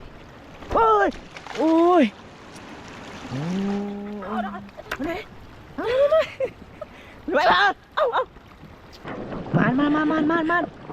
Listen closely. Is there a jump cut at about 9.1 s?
yes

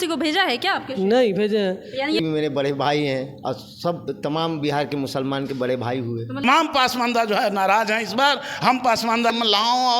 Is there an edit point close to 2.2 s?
yes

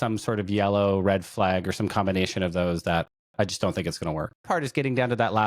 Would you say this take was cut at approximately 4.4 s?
yes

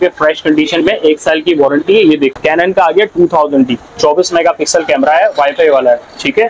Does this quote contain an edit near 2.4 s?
yes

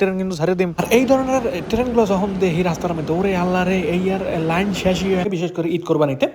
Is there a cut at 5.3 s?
yes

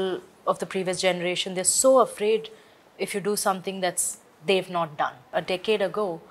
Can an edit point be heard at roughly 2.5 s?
no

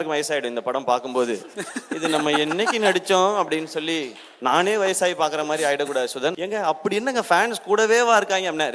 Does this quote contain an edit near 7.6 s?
no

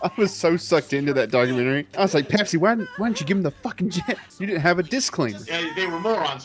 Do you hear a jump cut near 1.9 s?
yes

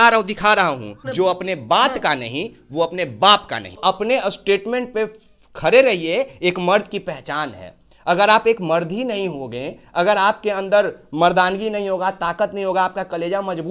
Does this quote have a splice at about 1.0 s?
yes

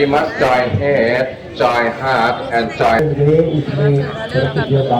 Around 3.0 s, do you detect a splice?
yes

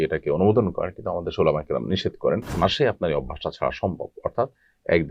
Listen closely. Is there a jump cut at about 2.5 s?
yes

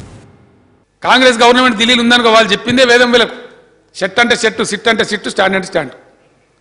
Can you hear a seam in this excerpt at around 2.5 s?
no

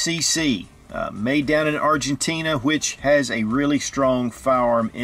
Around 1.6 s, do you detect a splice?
no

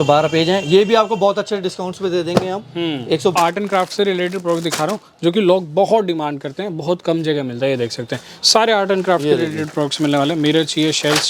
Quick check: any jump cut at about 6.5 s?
no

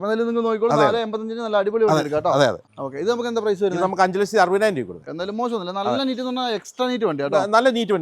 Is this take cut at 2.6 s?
yes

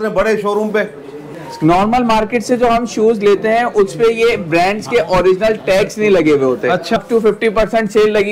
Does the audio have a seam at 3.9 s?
no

